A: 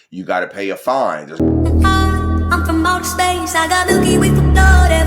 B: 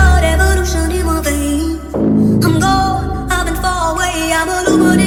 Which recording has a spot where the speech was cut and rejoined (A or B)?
A